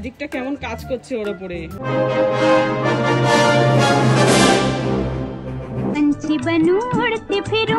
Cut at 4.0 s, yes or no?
no